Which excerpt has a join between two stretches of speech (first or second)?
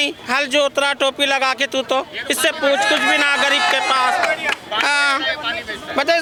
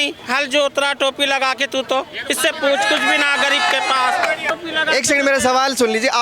second